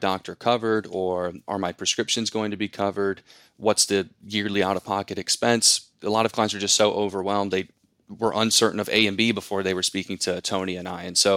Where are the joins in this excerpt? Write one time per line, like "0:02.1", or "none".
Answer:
0:01.4
0:05.9